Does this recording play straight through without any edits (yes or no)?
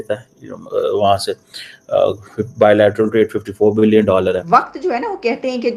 no